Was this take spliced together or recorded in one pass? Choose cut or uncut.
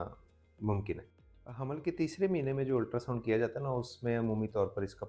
cut